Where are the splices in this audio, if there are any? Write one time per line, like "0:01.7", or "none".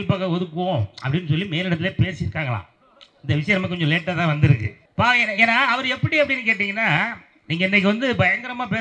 0:04.8